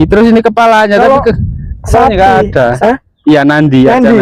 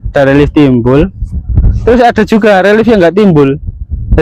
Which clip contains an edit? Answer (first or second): first